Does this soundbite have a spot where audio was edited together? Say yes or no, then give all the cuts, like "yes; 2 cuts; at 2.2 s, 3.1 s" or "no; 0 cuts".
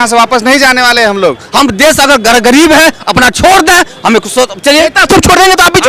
yes; 1 cut; at 1.4 s